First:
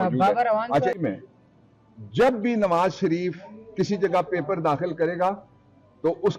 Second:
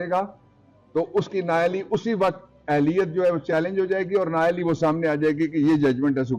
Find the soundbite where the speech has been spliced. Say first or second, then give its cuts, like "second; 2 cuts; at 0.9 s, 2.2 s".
first; 1 cut; at 0.9 s